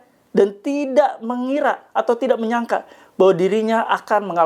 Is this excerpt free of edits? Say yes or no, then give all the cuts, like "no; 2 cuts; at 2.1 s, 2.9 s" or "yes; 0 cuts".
yes; 0 cuts